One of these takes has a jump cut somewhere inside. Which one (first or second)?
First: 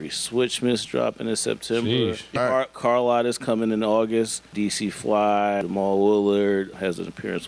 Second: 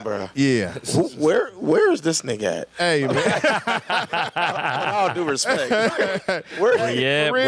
first